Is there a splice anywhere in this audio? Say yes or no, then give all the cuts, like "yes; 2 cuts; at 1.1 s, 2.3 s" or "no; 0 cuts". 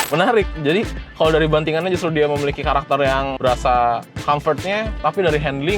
yes; 1 cut; at 3.4 s